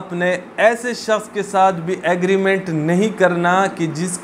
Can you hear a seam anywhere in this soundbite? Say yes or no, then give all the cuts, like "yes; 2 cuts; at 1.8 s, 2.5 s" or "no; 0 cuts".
no; 0 cuts